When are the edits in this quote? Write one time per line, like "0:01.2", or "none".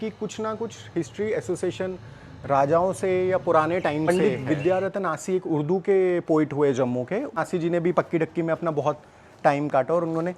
0:04.1
0:07.3